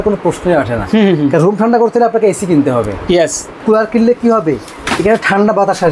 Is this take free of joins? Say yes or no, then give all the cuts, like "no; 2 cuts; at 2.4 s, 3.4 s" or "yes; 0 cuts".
no; 1 cut; at 3.5 s